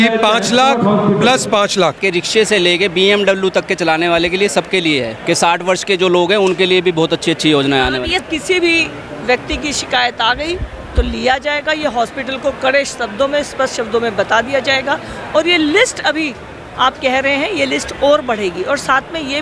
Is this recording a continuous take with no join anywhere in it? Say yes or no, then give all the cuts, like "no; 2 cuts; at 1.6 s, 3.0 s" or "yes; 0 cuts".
no; 3 cuts; at 2.0 s, 5.1 s, 8.2 s